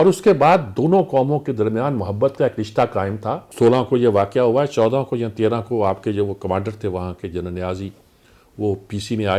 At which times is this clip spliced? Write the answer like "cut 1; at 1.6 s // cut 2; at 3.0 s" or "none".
cut 1; at 3.5 s